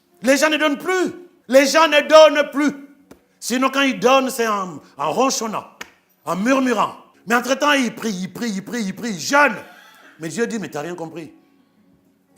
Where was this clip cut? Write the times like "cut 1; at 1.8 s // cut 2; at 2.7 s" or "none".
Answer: cut 1; at 1.3 s